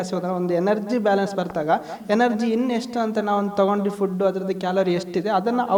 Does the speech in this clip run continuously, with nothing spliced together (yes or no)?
yes